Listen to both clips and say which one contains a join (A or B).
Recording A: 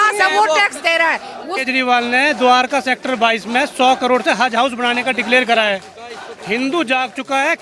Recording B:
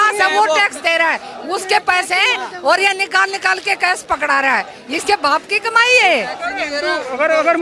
A